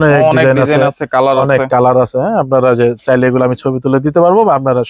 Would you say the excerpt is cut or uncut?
uncut